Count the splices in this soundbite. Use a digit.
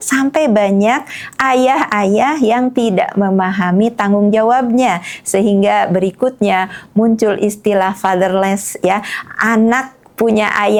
0